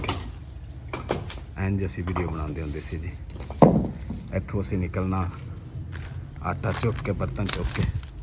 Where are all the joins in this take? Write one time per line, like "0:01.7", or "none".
none